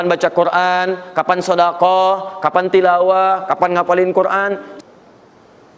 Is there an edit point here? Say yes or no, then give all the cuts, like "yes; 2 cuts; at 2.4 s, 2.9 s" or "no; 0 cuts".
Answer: yes; 1 cut; at 4.7 s